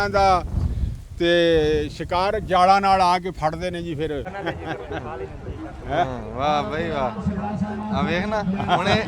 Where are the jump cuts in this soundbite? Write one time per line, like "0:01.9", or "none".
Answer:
0:04.3